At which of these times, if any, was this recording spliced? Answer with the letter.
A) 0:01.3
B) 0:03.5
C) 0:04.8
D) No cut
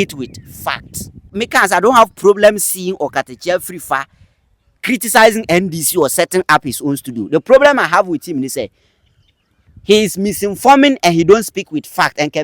A